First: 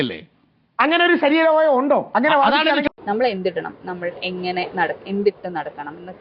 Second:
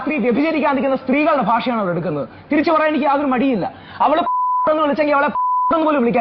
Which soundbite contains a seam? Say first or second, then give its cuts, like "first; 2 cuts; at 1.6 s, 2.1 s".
first; 1 cut; at 3.0 s